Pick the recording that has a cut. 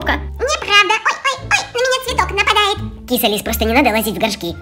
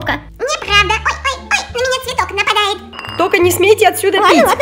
second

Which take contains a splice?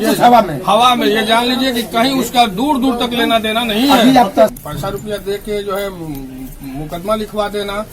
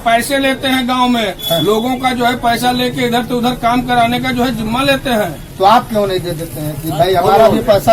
first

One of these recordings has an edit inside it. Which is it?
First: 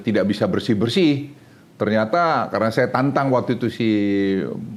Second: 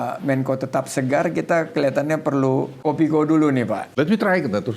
second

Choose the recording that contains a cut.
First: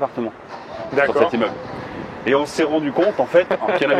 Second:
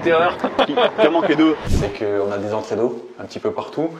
second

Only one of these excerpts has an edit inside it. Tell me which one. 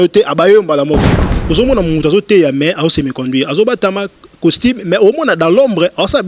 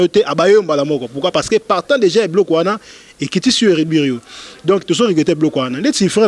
first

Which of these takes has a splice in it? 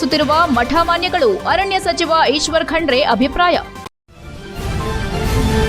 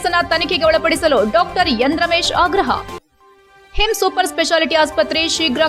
first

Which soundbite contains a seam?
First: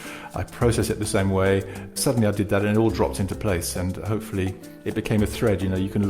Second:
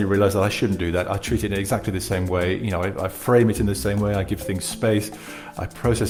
first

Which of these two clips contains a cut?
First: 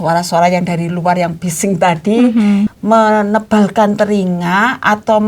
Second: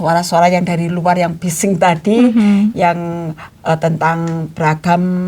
first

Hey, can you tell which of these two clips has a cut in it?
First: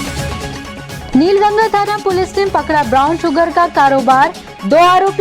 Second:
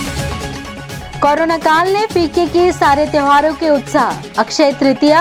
first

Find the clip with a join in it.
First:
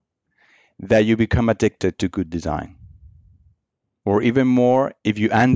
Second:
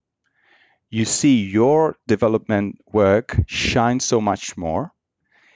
first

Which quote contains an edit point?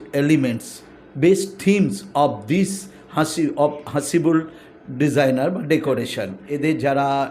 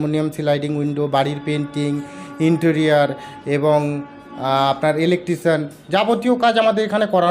first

